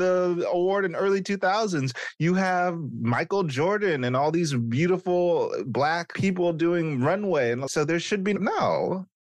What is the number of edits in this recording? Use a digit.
1